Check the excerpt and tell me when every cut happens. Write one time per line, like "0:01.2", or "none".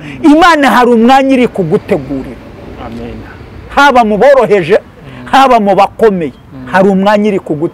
none